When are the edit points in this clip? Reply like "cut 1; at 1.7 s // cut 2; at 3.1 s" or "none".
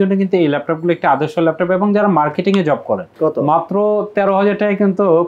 cut 1; at 3.1 s

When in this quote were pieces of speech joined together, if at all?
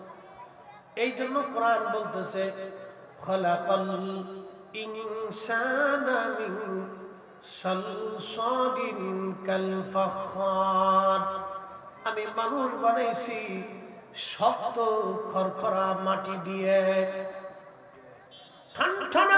none

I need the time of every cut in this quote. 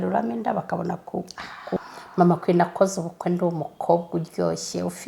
cut 1; at 1.7 s

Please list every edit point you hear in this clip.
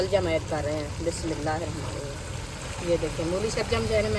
none

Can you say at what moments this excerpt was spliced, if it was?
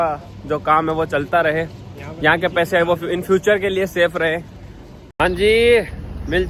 none

